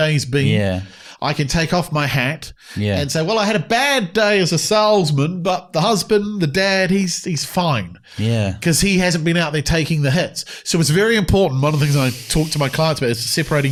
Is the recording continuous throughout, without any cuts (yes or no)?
yes